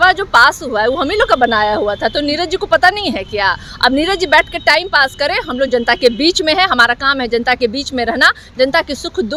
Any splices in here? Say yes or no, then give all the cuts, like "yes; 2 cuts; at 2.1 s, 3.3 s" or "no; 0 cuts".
no; 0 cuts